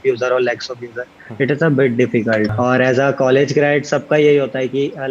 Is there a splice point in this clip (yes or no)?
yes